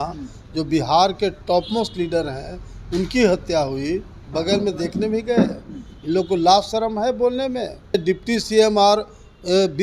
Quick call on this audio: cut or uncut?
cut